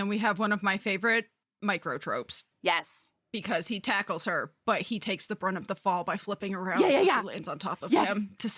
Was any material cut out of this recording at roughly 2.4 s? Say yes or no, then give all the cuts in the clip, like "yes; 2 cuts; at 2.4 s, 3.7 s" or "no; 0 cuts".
yes; 2 cuts; at 1.4 s, 2.4 s